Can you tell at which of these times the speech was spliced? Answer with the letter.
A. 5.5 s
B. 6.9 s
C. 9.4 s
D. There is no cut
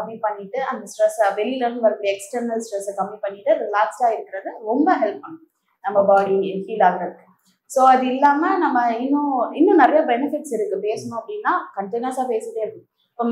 D